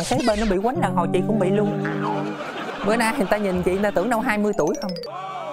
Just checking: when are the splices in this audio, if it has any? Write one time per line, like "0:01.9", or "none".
0:02.5